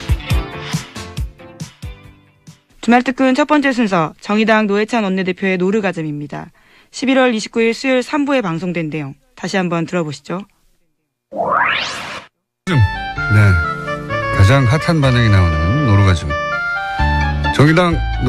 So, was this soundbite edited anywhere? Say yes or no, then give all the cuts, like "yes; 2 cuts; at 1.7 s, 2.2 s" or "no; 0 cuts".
no; 0 cuts